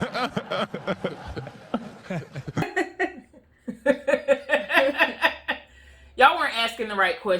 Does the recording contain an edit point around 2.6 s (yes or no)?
yes